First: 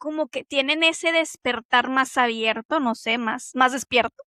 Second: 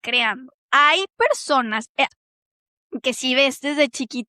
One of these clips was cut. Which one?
second; 1 cut; at 2.1 s

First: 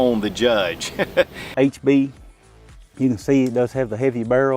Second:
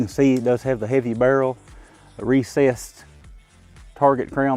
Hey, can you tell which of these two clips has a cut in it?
first; 1 cut; at 1.4 s

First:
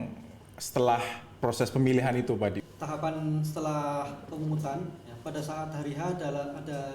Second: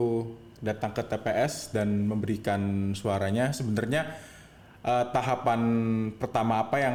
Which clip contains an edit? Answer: first; 1 cut; at 2.6 s

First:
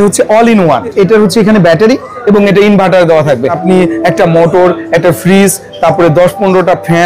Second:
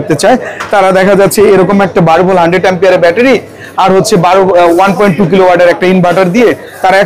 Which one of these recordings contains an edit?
first; 2 cuts; at 0.9 s, 3.6 s

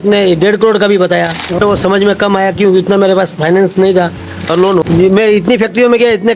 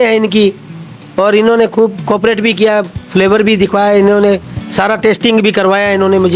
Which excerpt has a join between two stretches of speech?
first; 2 cuts; at 1.6 s, 4.8 s

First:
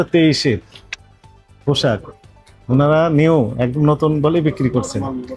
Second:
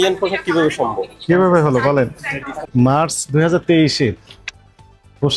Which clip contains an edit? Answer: second; 1 cut; at 2.6 s

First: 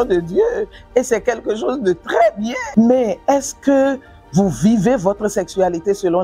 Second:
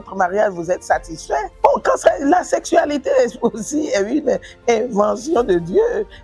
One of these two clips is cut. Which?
first; 1 cut; at 2.6 s

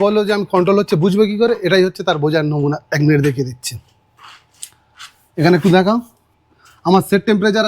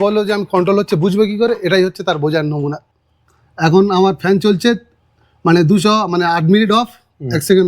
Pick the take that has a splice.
second; 1 cut; at 2.8 s

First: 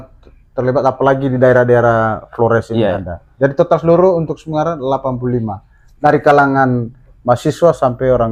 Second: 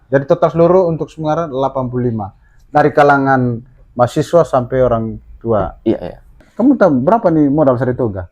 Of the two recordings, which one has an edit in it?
second; 1 cut; at 6.4 s

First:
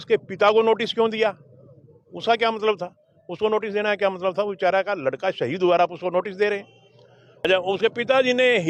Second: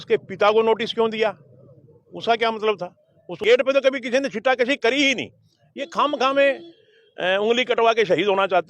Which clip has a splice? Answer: second; 1 cut; at 3.4 s

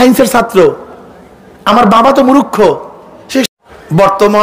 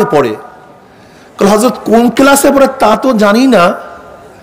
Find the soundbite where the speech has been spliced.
first; 1 cut; at 3.5 s

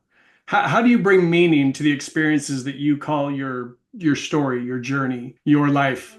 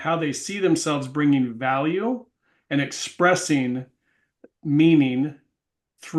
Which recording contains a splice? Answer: first; 1 cut; at 5.3 s

